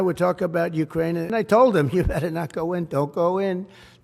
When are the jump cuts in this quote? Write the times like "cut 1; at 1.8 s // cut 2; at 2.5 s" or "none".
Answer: cut 1; at 1.3 s